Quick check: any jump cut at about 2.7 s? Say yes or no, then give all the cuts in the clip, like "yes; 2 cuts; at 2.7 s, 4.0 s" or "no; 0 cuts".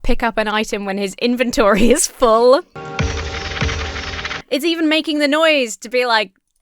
yes; 2 cuts; at 2.7 s, 4.4 s